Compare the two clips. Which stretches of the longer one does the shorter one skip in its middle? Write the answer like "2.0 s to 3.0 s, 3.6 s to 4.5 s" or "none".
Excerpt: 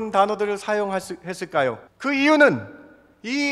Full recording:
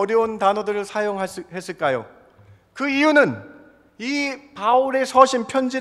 2.2 s to 2.6 s